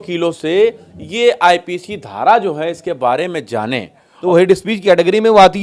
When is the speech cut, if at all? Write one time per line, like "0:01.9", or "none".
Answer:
0:04.1